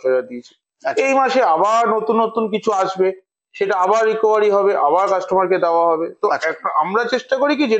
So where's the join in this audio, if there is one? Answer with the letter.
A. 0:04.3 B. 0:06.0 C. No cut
C